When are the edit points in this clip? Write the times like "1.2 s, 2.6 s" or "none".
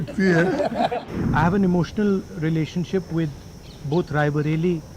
1.0 s